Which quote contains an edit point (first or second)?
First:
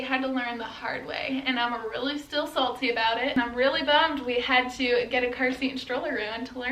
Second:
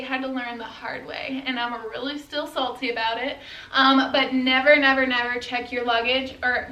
first